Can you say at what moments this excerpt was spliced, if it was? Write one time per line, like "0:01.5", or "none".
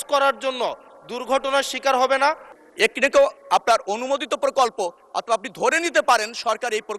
0:02.5

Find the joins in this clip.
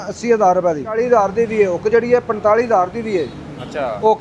0:00.9

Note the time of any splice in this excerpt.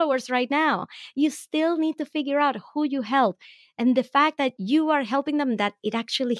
0:04.6

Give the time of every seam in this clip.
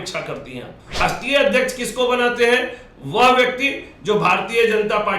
0:01.0

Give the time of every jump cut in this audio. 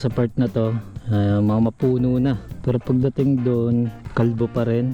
0:00.9
0:02.5
0:04.0

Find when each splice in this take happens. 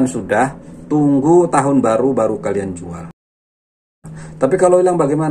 0:03.7

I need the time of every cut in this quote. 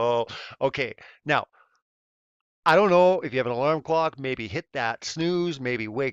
none

